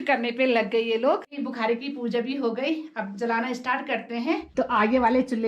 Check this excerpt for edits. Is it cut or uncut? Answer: cut